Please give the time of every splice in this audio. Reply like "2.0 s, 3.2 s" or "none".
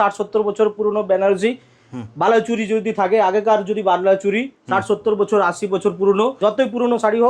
6.4 s